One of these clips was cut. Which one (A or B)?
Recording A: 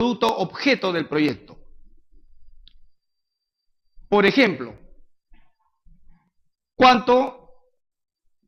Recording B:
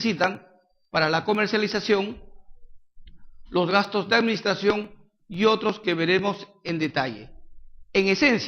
B